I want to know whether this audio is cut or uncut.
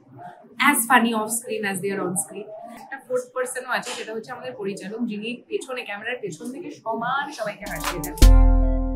cut